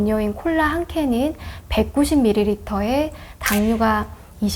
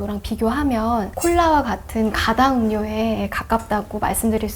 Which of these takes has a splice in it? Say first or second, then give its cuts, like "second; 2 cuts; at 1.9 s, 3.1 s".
second; 1 cut; at 1.1 s